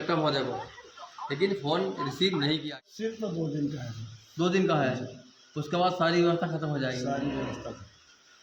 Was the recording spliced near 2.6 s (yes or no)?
yes